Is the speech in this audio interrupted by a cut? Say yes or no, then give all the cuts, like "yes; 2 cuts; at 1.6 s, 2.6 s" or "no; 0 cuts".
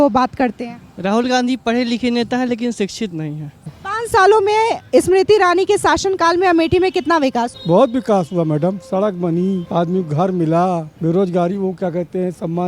yes; 4 cuts; at 3.8 s, 7.6 s, 9.6 s, 10.9 s